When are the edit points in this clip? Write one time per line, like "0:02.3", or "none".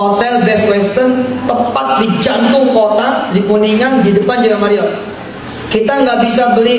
none